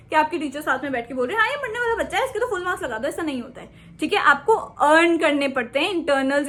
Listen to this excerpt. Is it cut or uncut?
uncut